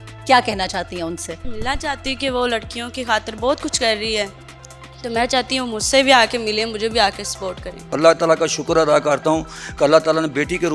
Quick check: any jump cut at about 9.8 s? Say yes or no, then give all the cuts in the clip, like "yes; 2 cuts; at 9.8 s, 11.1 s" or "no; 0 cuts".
no; 2 cuts; at 1.6 s, 7.9 s